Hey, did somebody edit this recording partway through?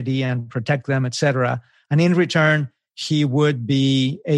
no; 0 cuts

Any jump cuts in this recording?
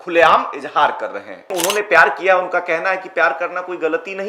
yes; 1 cut; at 1.5 s

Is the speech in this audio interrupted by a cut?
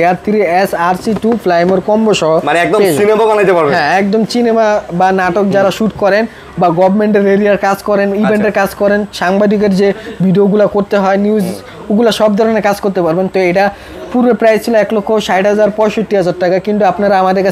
no; 0 cuts

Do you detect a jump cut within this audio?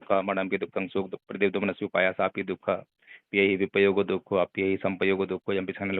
no; 0 cuts

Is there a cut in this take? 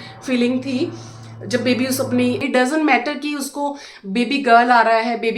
yes; 1 cut; at 2.7 s

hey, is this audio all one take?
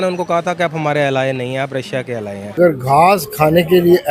no; 1 cut; at 2.6 s

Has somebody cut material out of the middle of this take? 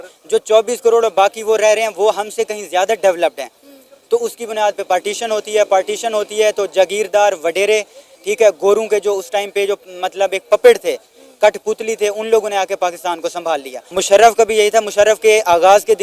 yes; 1 cut; at 13.8 s

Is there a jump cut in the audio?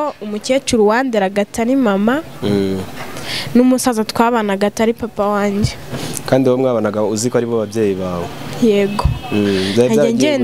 no; 0 cuts

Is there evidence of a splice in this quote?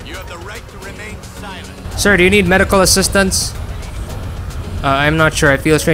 yes; 1 cut; at 1.9 s

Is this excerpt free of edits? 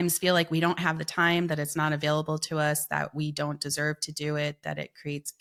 yes; 0 cuts

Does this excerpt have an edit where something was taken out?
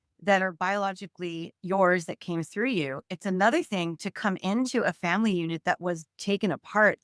no; 0 cuts

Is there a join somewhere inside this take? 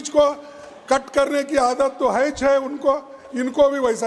no; 0 cuts

